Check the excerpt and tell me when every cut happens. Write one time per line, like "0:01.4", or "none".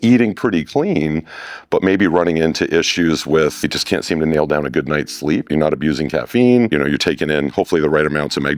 0:03.6
0:05.4
0:06.7